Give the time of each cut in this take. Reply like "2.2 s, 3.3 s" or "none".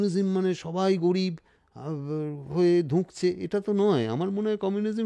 none